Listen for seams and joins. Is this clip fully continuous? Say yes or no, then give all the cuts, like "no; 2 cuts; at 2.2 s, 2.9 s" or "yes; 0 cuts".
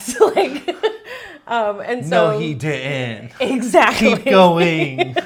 yes; 0 cuts